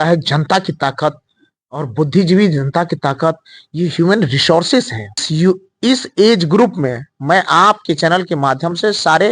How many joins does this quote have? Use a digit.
1